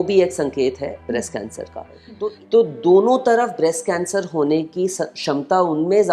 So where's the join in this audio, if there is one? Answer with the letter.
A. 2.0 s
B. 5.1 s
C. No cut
A